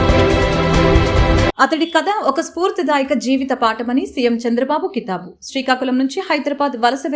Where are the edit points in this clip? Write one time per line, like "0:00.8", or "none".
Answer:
0:01.5